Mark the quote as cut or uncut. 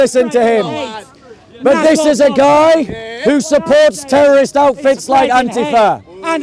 uncut